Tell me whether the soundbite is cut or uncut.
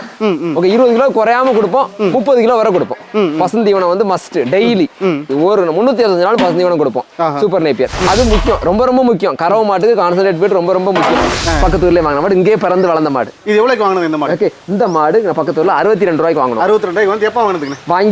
cut